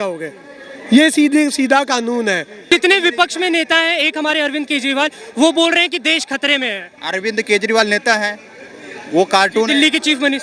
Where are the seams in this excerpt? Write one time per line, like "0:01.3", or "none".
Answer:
0:02.7